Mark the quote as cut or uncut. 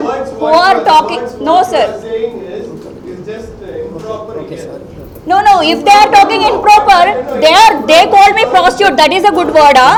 uncut